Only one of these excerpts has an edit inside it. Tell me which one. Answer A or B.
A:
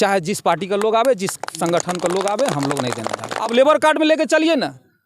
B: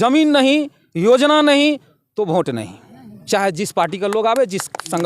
A